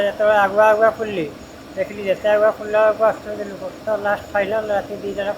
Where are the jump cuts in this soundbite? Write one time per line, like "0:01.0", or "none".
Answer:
0:03.8